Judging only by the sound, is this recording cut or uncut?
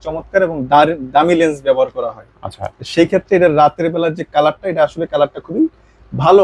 uncut